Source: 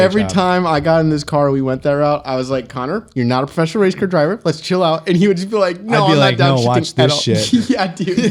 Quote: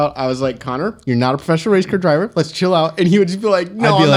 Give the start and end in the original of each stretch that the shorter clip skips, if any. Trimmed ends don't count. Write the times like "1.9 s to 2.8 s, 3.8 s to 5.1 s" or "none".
none